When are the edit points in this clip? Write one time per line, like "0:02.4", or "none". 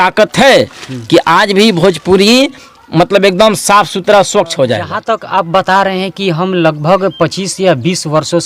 0:04.9